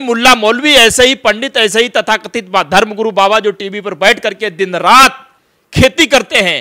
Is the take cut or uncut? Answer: uncut